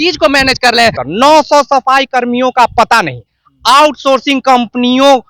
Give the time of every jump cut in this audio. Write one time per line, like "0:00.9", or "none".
0:01.0